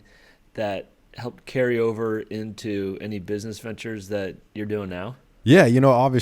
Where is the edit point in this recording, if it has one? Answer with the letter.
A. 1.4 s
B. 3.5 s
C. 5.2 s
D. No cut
C